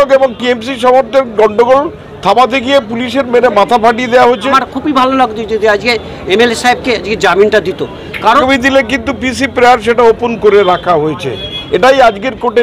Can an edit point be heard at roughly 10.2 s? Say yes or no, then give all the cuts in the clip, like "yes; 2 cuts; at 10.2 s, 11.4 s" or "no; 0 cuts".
no; 2 cuts; at 4.6 s, 8.4 s